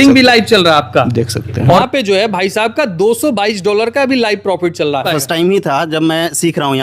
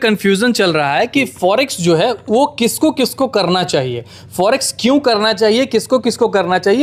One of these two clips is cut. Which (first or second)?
first